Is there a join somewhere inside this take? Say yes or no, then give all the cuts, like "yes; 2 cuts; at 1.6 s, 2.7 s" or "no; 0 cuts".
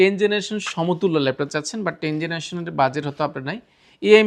no; 0 cuts